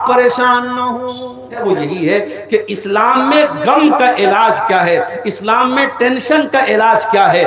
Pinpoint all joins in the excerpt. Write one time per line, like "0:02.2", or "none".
0:01.6